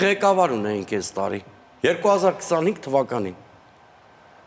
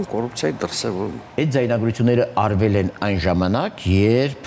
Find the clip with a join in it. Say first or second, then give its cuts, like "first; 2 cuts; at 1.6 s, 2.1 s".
second; 1 cut; at 1.2 s